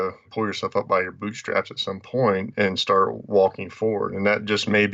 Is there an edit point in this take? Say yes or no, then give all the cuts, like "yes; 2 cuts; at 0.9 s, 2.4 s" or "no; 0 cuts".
no; 0 cuts